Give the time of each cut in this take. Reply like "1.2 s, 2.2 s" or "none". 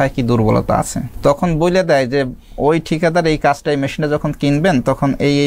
1.0 s